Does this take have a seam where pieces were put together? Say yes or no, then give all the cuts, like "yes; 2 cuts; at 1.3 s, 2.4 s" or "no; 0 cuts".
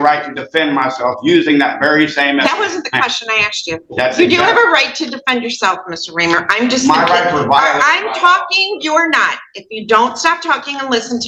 no; 0 cuts